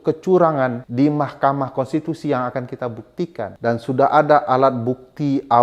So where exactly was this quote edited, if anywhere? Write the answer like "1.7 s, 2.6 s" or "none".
0.8 s, 3.5 s